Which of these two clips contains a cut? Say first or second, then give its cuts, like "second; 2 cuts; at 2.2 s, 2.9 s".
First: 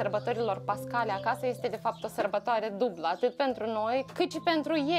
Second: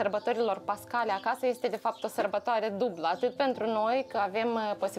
first; 1 cut; at 4.1 s